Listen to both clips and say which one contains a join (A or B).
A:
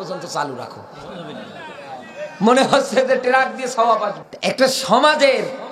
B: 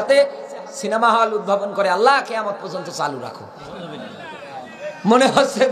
A